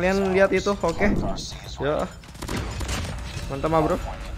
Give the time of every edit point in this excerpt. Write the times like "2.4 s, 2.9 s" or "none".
1.3 s